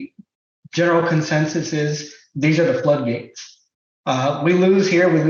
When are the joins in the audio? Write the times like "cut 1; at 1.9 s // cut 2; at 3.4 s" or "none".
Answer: none